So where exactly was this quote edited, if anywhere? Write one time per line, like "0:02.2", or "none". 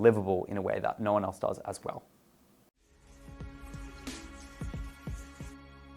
0:02.7